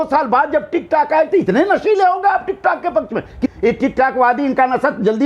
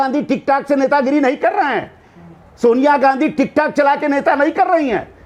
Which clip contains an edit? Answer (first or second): first